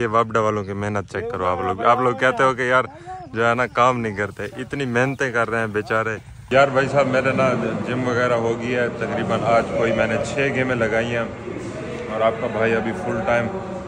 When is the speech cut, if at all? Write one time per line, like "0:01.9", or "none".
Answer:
0:06.4